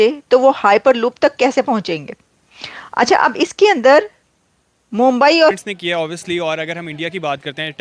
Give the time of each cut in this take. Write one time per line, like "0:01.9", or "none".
0:05.6